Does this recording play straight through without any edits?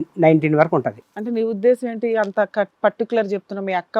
no; 1 cut; at 1.0 s

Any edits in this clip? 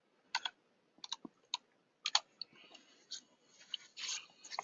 no; 0 cuts

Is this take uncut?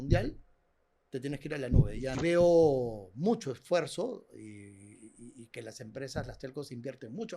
no; 1 cut; at 2.1 s

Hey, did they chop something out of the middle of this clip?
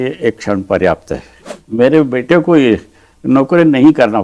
yes; 1 cut; at 1.6 s

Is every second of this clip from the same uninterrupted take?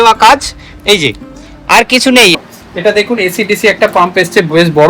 no; 1 cut; at 2.3 s

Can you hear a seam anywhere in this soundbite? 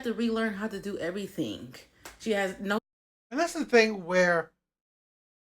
no; 0 cuts

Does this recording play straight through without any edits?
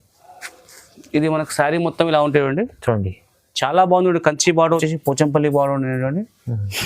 no; 1 cut; at 4.8 s

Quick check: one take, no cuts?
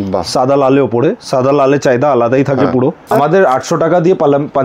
no; 1 cut; at 3.1 s

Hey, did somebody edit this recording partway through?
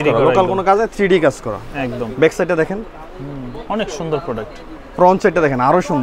no; 0 cuts

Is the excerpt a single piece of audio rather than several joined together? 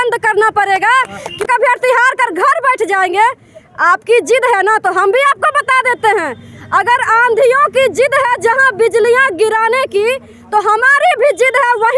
no; 1 cut; at 1.5 s

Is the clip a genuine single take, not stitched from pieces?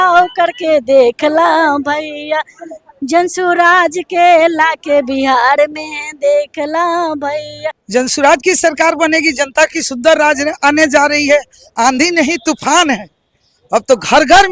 no; 1 cut; at 7.8 s

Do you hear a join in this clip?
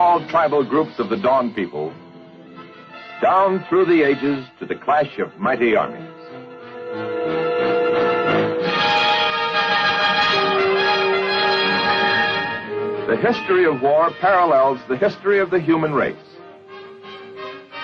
no; 0 cuts

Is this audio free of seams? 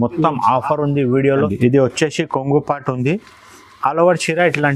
no; 1 cut; at 1.5 s

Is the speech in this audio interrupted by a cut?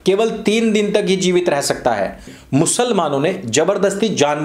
yes; 1 cut; at 2.2 s

